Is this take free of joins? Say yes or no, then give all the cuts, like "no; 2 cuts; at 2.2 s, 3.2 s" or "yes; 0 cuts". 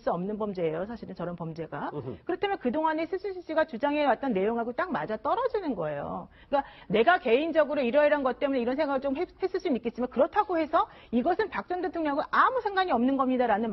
no; 1 cut; at 2.5 s